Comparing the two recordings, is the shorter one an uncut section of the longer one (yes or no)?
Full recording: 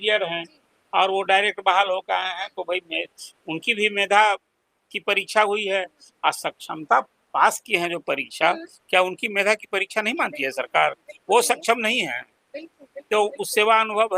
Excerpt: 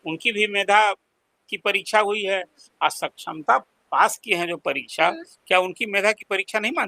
yes